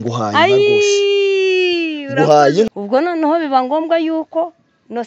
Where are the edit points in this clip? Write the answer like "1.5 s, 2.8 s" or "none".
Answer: 2.7 s